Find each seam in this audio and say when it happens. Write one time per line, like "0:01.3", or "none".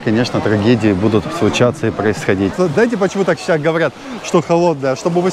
0:02.5